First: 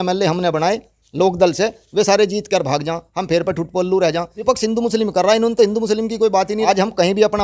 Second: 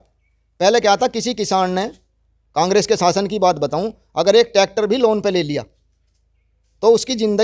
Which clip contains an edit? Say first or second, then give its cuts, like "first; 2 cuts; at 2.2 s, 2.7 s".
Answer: first; 2 cuts; at 4.3 s, 6.6 s